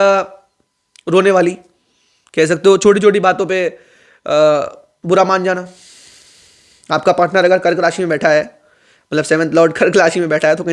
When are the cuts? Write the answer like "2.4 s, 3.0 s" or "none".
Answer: none